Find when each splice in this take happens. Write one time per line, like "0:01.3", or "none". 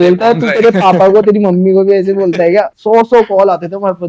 0:02.7